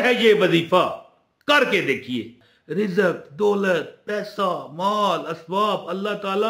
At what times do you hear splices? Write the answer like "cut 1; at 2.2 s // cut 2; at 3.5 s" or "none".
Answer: cut 1; at 2.4 s

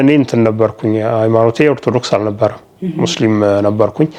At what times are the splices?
none

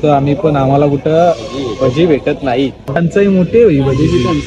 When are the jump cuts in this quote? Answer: cut 1; at 2.9 s

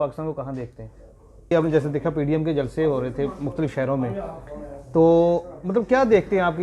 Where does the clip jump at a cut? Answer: cut 1; at 1.5 s

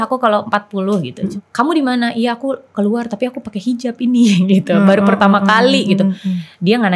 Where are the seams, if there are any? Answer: cut 1; at 1.2 s

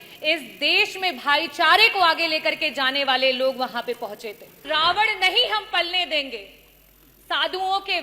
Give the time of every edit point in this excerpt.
cut 1; at 4.6 s

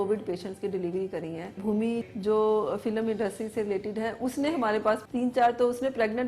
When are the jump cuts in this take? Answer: cut 1; at 1.6 s // cut 2; at 5.0 s

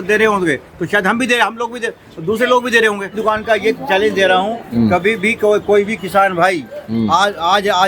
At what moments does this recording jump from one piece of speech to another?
cut 1; at 3.1 s

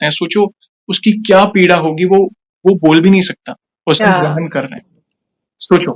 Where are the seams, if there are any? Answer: none

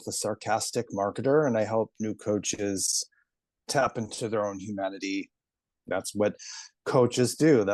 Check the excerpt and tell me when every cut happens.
cut 1; at 5.9 s

